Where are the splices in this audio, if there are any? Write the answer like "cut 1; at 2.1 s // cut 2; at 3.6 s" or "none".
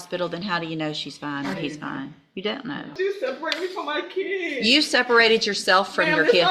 cut 1; at 2.9 s